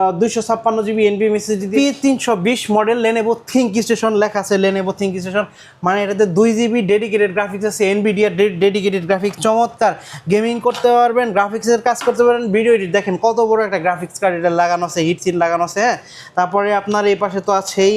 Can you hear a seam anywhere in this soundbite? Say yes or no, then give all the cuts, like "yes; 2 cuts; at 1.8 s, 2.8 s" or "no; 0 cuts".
yes; 1 cut; at 1.7 s